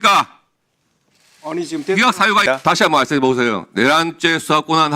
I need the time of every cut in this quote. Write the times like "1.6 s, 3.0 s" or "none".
2.4 s